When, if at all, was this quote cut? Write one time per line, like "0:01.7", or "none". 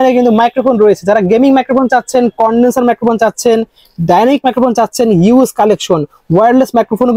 none